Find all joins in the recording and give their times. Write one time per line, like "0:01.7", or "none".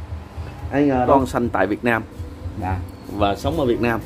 0:01.1